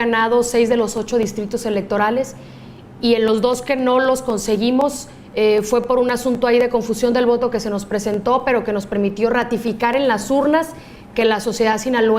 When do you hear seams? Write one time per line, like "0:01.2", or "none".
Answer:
0:02.0